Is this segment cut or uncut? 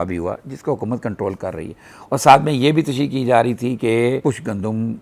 uncut